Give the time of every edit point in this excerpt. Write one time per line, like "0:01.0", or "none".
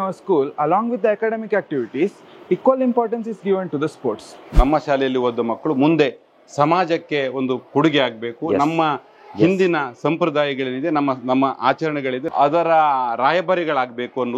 0:04.6